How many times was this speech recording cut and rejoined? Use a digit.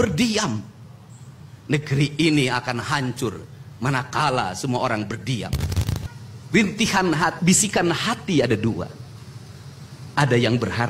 1